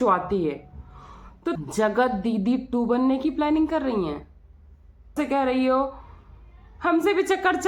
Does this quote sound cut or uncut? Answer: cut